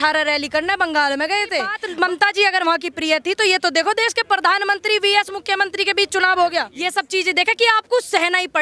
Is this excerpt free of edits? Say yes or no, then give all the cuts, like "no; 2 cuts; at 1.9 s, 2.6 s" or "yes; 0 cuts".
no; 2 cuts; at 1.8 s, 6.8 s